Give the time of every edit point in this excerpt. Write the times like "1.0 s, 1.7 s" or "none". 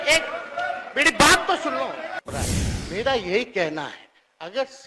2.3 s